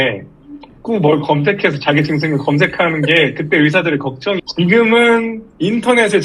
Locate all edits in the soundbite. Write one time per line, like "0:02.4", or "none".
0:04.5